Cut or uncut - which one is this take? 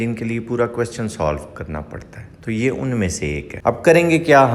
cut